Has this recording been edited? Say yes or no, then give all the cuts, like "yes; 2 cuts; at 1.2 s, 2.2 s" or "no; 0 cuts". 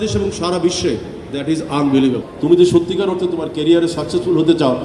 yes; 1 cut; at 2.3 s